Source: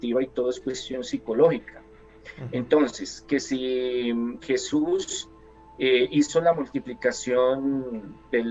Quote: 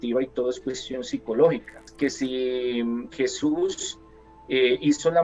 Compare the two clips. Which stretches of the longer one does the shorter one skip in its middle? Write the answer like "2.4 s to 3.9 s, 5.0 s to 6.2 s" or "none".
1.8 s to 3.1 s